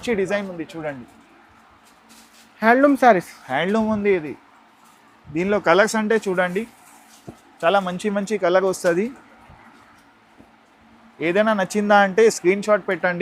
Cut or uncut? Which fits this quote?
uncut